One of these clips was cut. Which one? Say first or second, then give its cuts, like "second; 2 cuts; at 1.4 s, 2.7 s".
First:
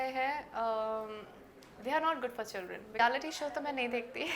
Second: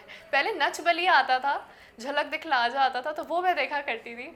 first; 1 cut; at 2.8 s